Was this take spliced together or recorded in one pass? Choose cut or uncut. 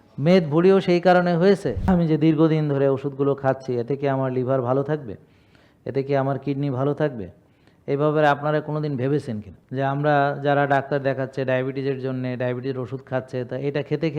cut